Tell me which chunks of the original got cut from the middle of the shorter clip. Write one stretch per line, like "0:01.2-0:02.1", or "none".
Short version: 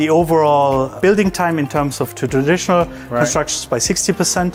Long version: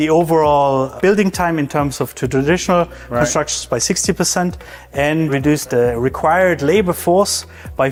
none

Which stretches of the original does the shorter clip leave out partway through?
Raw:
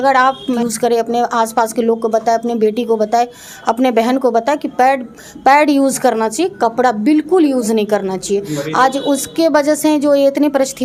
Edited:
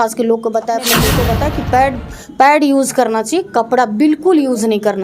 0:02.6-0:04.1

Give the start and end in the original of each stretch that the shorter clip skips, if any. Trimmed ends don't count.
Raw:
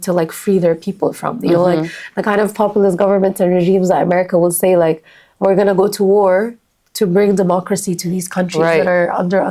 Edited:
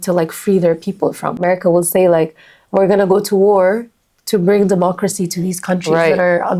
0:01.4-0:04.1

